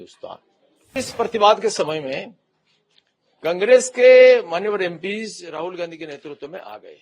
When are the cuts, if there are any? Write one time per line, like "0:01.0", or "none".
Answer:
0:01.0